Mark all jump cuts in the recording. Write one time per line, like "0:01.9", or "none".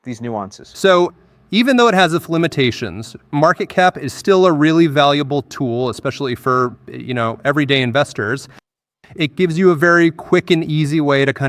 none